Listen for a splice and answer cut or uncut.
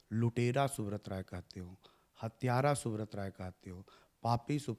uncut